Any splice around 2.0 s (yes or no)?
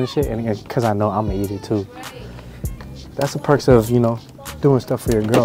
no